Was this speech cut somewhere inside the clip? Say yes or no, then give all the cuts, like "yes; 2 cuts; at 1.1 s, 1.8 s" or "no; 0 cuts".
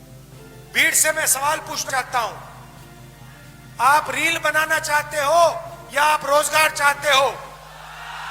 yes; 2 cuts; at 0.7 s, 1.9 s